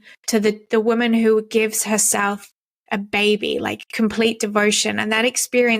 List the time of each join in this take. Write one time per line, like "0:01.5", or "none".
0:02.5